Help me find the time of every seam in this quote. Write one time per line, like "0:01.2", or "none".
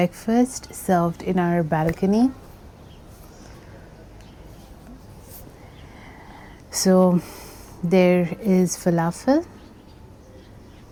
none